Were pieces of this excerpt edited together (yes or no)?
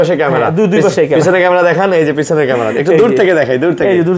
no